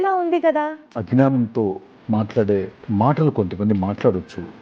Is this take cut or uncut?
cut